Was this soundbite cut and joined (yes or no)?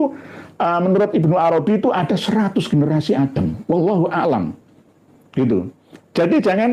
no